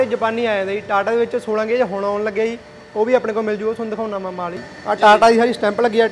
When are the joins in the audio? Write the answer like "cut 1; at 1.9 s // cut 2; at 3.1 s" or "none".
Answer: cut 1; at 4.7 s